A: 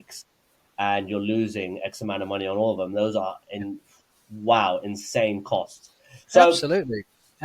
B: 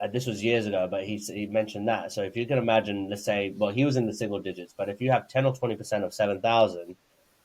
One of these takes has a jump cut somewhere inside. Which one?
A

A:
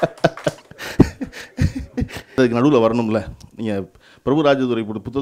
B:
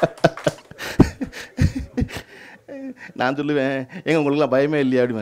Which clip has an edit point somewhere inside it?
A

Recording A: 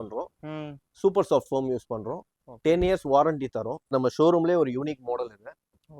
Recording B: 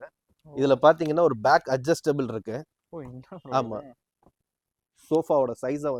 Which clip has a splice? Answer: A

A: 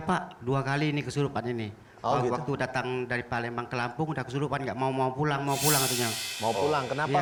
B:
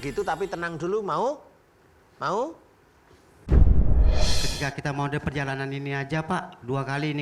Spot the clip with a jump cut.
B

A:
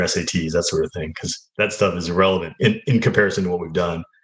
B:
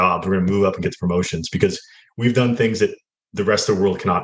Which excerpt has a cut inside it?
A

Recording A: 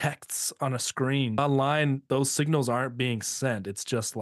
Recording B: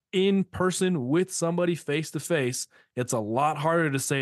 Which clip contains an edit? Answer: A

